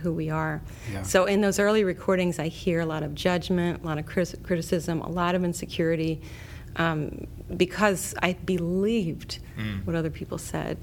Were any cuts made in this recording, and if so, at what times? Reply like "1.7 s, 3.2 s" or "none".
none